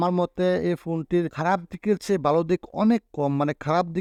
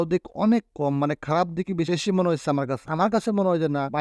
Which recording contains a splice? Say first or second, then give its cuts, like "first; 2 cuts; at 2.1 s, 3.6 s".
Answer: second; 1 cut; at 2.8 s